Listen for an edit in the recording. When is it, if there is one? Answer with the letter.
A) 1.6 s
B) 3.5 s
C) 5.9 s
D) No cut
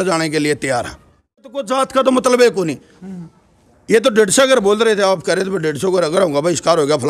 A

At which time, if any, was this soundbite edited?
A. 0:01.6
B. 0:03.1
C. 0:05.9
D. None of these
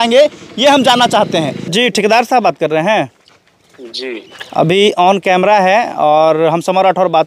A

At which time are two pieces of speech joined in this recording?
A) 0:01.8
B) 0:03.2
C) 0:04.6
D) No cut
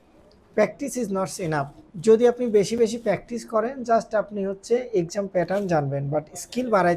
A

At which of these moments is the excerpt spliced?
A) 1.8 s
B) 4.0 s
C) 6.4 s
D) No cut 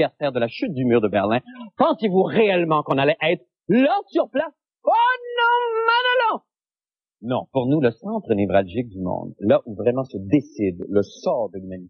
B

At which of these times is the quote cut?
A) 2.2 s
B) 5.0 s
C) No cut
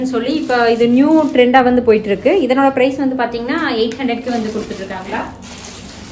B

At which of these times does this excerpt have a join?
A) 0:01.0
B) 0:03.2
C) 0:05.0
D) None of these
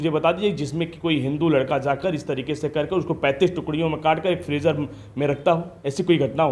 D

